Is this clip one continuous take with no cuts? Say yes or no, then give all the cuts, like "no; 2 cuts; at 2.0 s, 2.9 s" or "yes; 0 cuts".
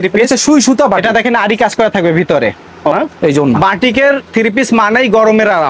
no; 1 cut; at 2.9 s